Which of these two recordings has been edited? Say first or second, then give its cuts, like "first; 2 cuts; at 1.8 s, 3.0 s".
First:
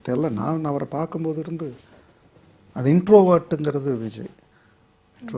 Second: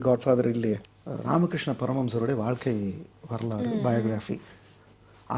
second; 1 cut; at 0.9 s